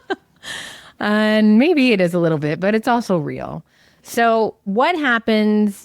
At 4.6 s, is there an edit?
yes; 1 cut; at 4.6 s

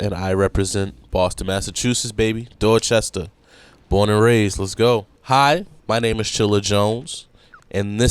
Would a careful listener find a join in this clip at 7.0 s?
no; 2 cuts; at 5.1 s, 5.7 s

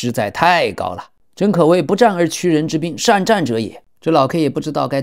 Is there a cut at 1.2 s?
no; 1 cut; at 3.9 s

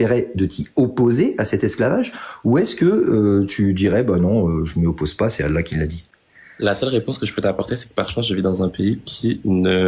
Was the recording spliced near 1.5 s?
no; 0 cuts

